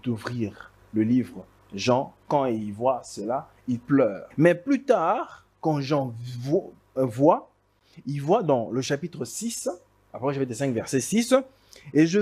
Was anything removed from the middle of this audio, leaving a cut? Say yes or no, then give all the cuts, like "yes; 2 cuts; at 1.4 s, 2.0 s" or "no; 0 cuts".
yes; 1 cut; at 4.2 s